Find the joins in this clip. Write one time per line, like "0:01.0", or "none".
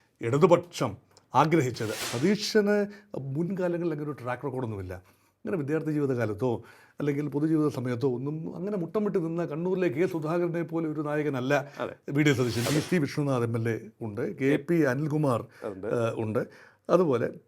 0:02.0
0:12.6